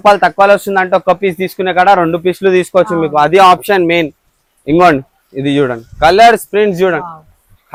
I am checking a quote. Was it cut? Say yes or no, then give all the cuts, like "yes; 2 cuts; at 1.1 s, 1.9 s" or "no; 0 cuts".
no; 0 cuts